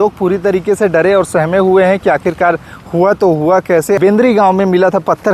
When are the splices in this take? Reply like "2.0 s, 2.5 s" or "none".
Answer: 4.0 s